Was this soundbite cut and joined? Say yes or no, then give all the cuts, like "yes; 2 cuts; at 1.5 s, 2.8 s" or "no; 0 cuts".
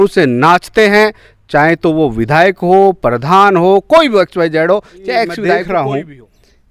yes; 1 cut; at 5.4 s